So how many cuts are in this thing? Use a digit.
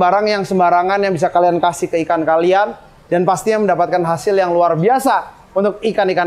0